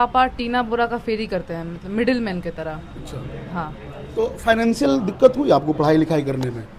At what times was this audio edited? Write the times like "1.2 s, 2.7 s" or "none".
none